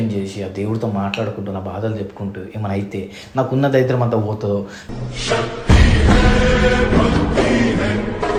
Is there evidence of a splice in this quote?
no; 0 cuts

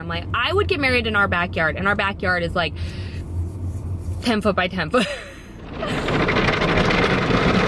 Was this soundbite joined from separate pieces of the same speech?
yes; 1 cut; at 5.8 s

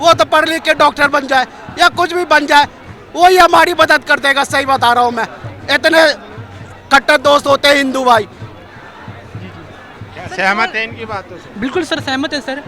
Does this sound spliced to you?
no; 0 cuts

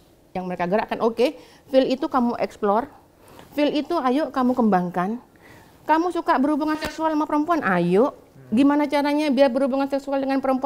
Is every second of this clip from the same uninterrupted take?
yes; 0 cuts

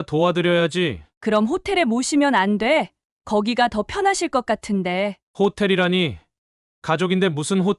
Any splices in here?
no; 0 cuts

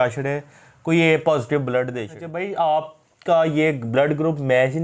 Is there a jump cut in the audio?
yes; 1 cut; at 2.3 s

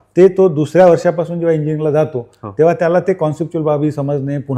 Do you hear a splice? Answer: no; 0 cuts

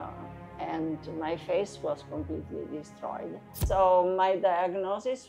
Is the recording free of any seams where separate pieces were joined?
no; 1 cut; at 3.5 s

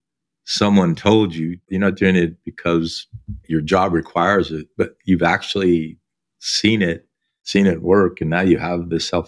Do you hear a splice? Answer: yes; 2 cuts; at 1.7 s, 3.4 s

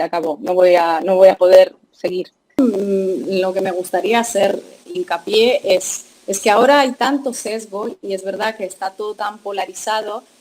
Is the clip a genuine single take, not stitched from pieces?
no; 1 cut; at 2.6 s

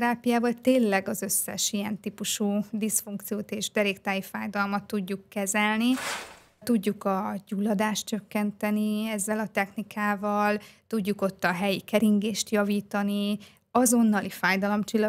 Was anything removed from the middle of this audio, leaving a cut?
yes; 1 cut; at 6.6 s

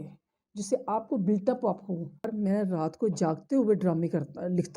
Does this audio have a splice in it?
yes; 1 cut; at 2.3 s

